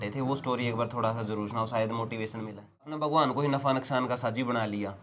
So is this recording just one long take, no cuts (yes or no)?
no